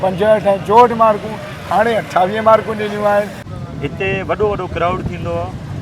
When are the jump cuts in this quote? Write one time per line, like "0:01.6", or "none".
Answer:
0:03.4